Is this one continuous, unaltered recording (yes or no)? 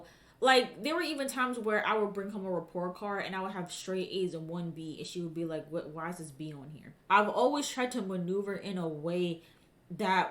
no